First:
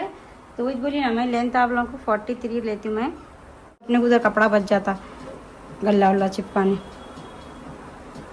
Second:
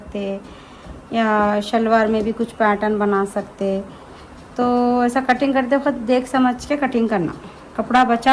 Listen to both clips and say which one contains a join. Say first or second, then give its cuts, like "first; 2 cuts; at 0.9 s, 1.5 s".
first; 1 cut; at 3.9 s